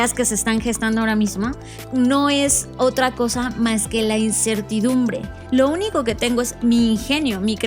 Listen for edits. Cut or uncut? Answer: cut